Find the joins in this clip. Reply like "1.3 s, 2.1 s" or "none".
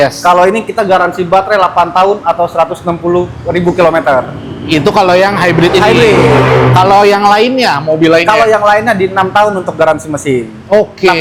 none